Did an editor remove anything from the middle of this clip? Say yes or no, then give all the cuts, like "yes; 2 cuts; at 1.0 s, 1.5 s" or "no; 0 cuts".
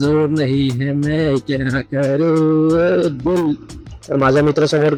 no; 0 cuts